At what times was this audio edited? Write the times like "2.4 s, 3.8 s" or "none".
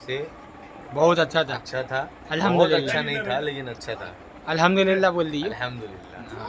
none